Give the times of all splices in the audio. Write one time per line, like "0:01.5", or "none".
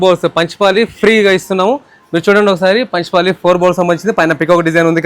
none